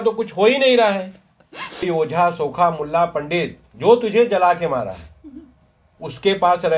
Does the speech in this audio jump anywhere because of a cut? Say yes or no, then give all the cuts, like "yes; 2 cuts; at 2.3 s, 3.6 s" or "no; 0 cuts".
yes; 1 cut; at 1.8 s